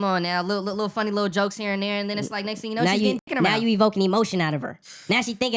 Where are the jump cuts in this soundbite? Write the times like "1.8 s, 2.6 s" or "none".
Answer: none